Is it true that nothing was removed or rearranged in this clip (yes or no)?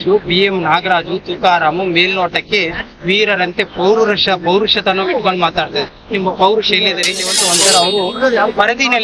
no